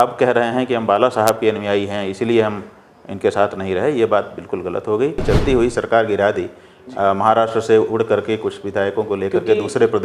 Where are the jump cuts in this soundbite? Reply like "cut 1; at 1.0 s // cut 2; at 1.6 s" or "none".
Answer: cut 1; at 5.2 s